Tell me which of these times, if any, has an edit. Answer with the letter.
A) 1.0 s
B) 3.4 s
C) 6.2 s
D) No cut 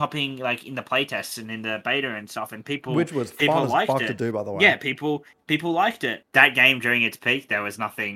C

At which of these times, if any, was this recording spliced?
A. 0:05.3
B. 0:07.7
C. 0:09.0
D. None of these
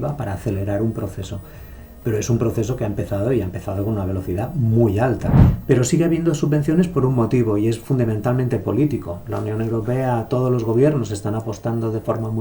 A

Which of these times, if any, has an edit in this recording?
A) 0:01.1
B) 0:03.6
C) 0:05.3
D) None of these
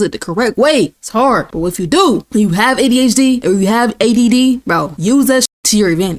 C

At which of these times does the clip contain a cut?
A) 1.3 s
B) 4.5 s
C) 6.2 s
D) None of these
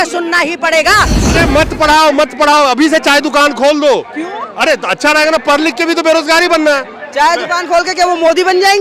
A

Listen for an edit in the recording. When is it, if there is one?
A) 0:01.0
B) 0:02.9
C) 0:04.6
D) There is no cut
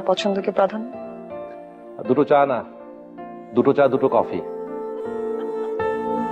D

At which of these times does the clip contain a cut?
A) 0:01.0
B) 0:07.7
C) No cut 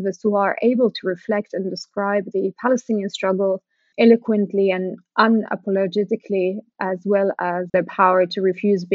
B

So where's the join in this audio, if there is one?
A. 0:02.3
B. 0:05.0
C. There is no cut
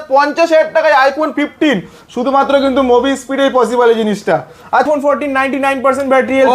B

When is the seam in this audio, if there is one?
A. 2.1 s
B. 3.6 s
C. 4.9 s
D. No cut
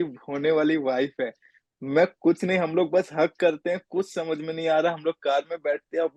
D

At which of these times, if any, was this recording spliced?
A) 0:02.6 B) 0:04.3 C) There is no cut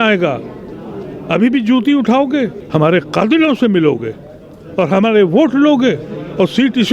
A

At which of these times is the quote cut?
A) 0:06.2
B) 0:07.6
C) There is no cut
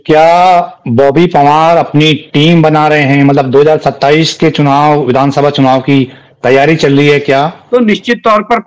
B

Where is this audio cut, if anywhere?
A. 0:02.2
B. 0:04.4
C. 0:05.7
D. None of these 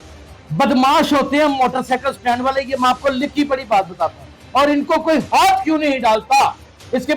B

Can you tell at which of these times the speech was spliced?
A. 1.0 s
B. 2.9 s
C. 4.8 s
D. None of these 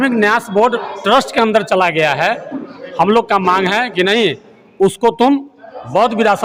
D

